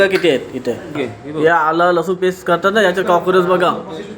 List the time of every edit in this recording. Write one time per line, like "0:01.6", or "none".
0:01.0